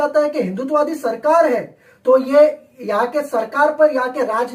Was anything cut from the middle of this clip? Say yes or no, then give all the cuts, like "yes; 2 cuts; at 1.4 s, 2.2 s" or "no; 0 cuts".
no; 0 cuts